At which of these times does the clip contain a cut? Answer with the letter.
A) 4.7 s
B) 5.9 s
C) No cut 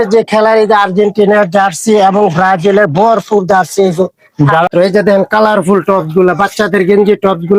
A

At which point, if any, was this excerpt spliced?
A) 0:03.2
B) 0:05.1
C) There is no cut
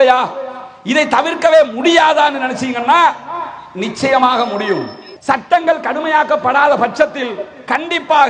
B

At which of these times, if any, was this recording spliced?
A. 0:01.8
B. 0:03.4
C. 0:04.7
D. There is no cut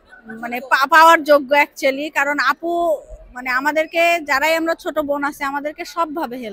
D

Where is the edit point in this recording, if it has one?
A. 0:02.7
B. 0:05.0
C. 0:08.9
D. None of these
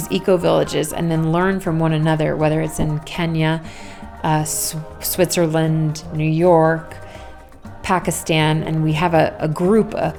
D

